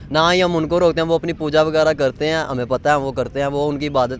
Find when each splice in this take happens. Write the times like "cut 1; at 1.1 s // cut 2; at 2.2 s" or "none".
none